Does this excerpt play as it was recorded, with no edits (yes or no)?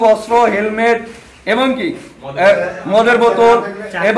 yes